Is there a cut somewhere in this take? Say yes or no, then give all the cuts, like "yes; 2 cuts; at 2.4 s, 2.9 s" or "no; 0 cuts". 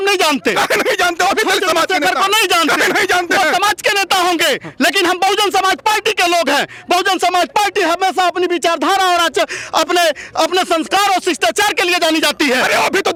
no; 0 cuts